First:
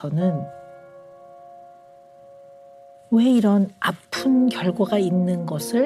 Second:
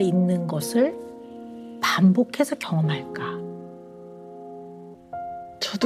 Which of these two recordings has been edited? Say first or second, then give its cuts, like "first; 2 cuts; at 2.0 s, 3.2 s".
second; 1 cut; at 4.9 s